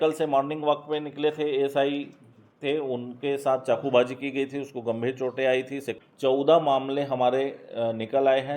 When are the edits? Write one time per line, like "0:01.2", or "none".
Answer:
0:05.9